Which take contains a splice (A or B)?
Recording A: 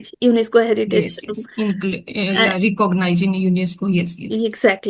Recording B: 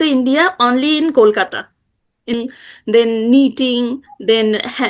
B